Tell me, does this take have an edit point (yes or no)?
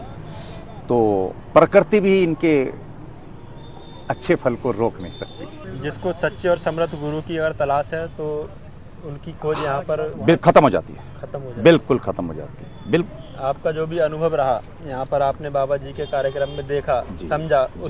yes